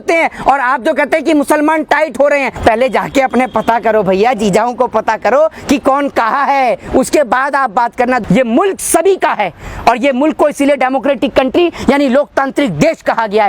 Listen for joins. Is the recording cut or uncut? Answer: cut